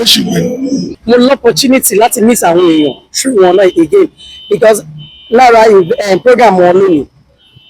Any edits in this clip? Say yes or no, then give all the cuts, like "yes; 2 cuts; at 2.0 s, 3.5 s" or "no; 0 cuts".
yes; 1 cut; at 0.9 s